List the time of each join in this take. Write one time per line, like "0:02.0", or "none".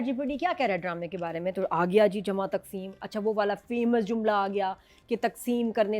none